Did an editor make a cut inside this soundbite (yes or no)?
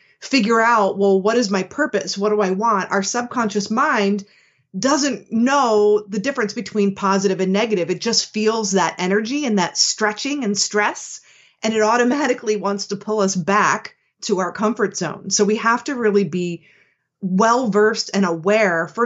no